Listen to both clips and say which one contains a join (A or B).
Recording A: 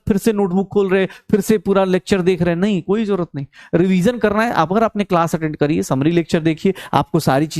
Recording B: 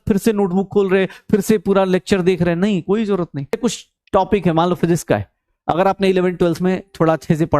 B